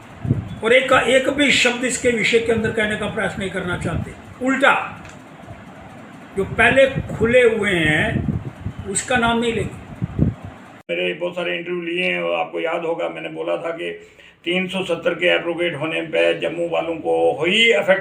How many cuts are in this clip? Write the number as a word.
one